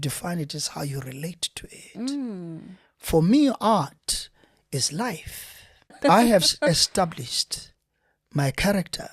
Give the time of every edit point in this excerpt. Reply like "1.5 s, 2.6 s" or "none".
6.0 s